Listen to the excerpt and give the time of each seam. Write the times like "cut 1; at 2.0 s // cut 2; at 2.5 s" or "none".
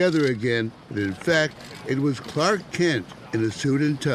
cut 1; at 3.1 s